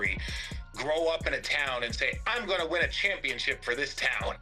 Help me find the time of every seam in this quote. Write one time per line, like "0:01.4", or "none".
none

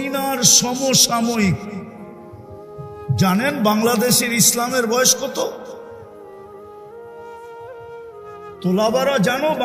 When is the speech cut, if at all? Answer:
none

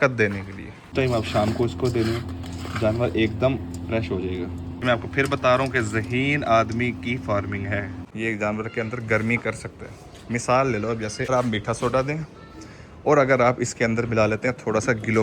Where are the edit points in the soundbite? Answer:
0:00.9
0:04.8
0:08.0
0:11.3

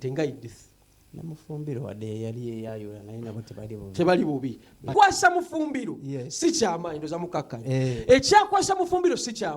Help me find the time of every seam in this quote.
0:04.9

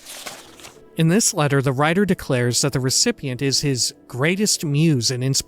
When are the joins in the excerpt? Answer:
0:00.9

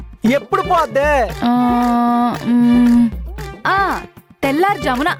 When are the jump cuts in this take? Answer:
none

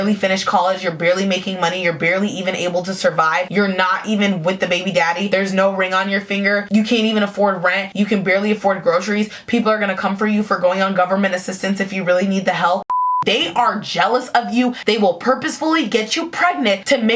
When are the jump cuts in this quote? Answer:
0:13.1

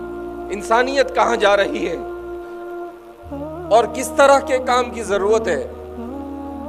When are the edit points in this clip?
none

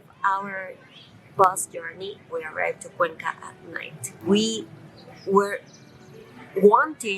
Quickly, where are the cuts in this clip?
0:04.1

